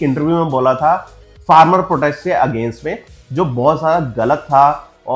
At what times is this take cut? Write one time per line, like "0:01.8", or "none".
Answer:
none